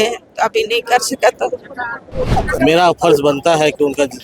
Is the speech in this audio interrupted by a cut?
yes; 1 cut; at 2.4 s

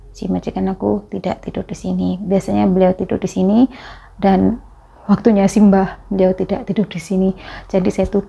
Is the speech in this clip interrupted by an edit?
no; 0 cuts

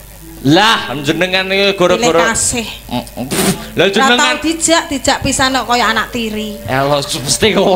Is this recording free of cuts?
yes; 0 cuts

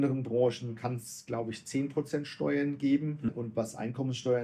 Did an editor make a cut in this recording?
yes; 1 cut; at 3.4 s

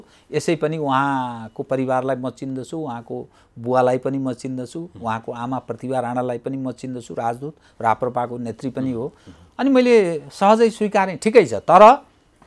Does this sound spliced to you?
no; 0 cuts

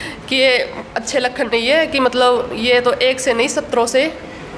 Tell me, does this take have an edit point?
no; 0 cuts

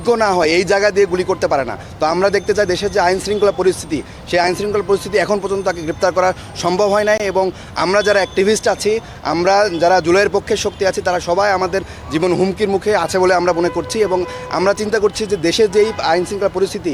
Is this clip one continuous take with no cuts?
yes; 0 cuts

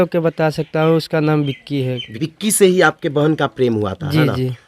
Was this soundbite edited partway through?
yes; 1 cut; at 2.2 s

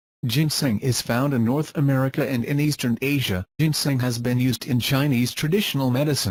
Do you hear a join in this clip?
no; 0 cuts

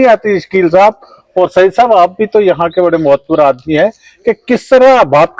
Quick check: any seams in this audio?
no; 0 cuts

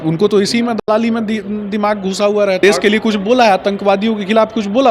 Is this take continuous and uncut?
no; 1 cut; at 2.6 s

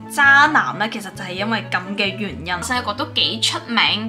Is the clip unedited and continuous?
no; 1 cut; at 2.7 s

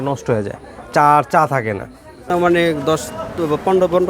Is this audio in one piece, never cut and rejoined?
no; 1 cut; at 2.2 s

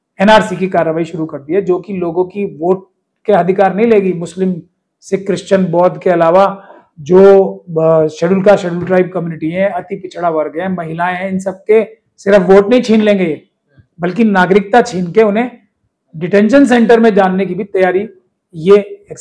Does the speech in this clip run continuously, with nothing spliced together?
yes; 0 cuts

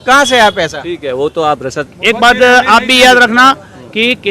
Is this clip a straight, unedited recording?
no; 1 cut; at 1.9 s

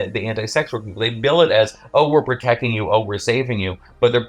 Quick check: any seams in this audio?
no; 0 cuts

